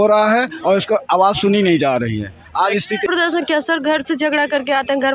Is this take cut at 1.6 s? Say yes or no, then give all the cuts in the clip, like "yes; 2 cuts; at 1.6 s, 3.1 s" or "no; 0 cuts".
no; 1 cut; at 3.1 s